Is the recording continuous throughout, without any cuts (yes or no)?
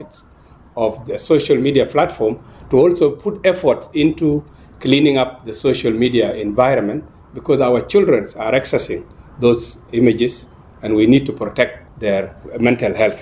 no